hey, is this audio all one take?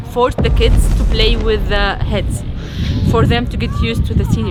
yes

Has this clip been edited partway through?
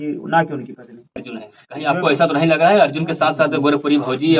yes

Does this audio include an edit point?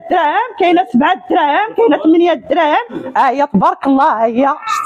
yes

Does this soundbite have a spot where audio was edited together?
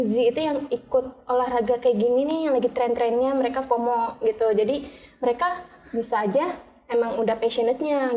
no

